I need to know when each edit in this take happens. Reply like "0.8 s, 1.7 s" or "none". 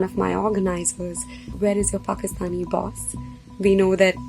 1.5 s